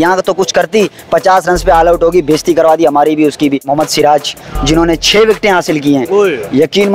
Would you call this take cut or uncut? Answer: cut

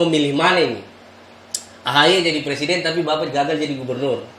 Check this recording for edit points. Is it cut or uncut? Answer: uncut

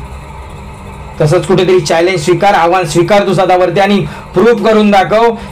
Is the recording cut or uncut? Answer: uncut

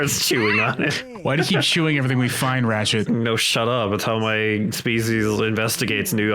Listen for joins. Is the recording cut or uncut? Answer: cut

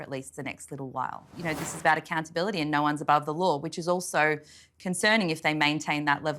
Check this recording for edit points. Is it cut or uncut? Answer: cut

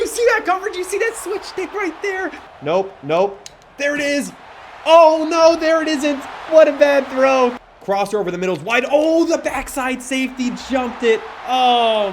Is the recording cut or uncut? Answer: cut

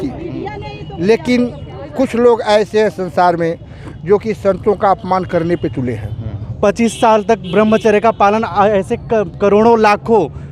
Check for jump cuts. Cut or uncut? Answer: cut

